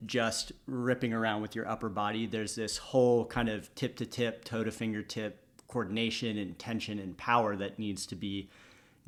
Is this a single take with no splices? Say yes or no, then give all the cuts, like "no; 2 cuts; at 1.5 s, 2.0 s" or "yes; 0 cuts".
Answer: yes; 0 cuts